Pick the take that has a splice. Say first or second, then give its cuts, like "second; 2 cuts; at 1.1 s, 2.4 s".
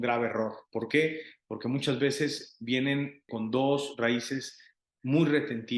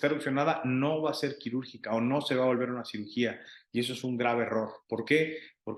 first; 1 cut; at 3.3 s